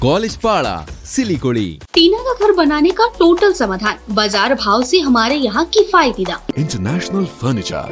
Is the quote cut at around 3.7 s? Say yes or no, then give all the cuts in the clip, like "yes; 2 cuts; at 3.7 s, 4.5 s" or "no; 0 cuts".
no; 2 cuts; at 1.8 s, 6.5 s